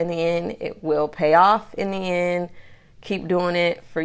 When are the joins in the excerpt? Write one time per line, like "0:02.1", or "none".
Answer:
none